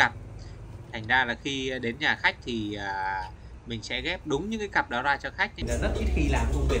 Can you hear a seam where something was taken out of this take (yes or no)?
yes